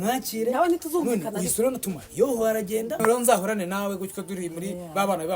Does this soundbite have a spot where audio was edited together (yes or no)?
yes